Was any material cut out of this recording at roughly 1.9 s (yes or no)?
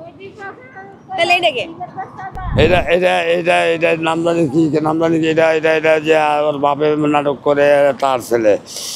no